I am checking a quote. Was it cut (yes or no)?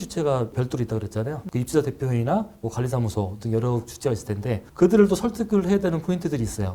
no